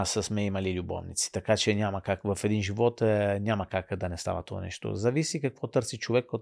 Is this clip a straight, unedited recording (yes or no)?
yes